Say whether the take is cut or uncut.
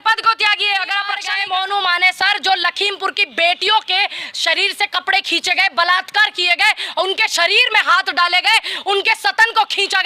cut